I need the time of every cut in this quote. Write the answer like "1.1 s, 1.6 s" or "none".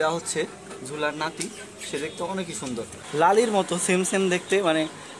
3.0 s